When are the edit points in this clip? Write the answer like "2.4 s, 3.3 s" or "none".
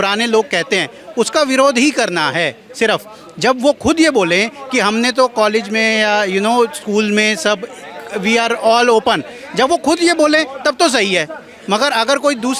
none